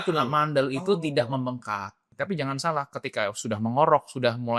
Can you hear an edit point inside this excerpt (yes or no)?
yes